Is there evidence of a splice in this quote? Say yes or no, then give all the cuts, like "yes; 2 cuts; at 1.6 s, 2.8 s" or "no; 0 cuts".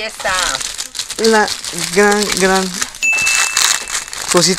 no; 0 cuts